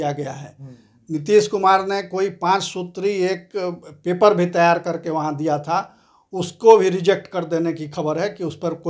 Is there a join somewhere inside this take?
no; 0 cuts

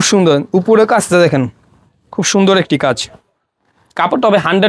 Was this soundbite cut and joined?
no; 0 cuts

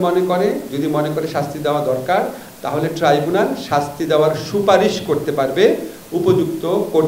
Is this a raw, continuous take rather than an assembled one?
yes; 0 cuts

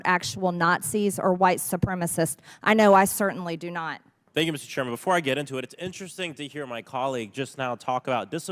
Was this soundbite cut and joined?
yes; 1 cut; at 4.2 s

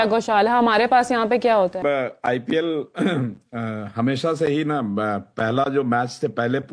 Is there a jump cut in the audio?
yes; 1 cut; at 1.8 s

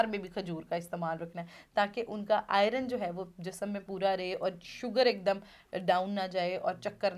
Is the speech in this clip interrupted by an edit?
no; 0 cuts

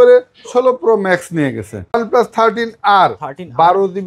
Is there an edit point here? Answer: yes; 1 cut; at 2.0 s

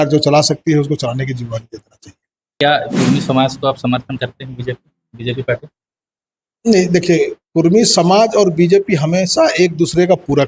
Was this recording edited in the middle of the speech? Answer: yes; 1 cut; at 2.5 s

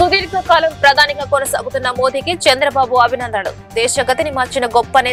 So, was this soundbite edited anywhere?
no; 0 cuts

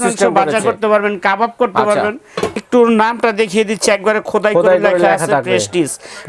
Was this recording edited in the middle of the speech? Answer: yes; 1 cut; at 2.4 s

